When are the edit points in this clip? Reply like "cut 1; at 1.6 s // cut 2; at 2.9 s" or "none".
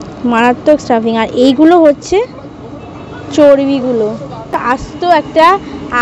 cut 1; at 4.7 s